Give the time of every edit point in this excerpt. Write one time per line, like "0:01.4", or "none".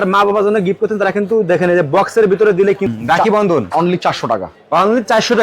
0:02.9